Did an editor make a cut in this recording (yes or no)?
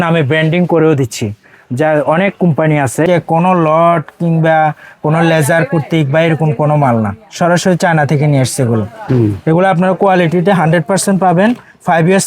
yes